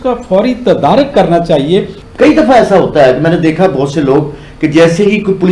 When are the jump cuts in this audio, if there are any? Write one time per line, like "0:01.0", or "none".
0:02.0

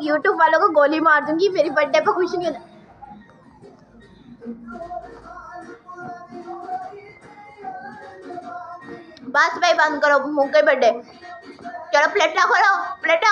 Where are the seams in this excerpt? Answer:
none

